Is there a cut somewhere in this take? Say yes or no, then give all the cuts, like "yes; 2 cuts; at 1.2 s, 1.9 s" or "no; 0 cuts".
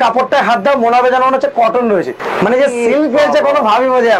yes; 1 cut; at 2.2 s